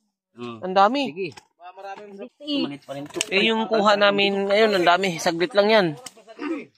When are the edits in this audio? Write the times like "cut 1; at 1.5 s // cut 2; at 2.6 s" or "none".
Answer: cut 1; at 2.3 s